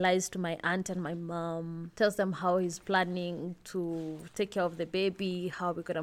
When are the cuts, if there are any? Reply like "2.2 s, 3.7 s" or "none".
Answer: 1.8 s

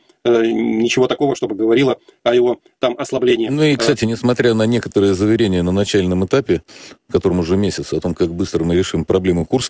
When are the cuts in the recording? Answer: 3.5 s

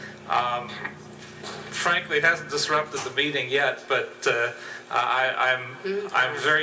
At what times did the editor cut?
none

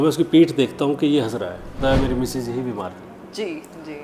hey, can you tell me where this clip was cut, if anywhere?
1.8 s

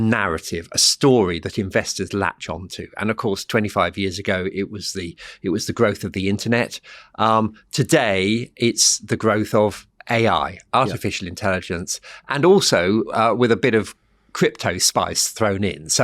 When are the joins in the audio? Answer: none

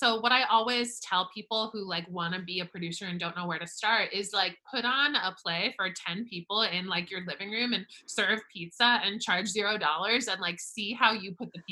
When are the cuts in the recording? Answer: none

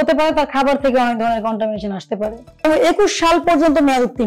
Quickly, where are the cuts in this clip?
2.6 s

